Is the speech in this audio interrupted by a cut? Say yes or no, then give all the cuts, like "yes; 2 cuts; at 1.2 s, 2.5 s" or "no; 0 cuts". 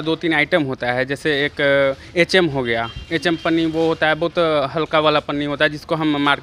no; 0 cuts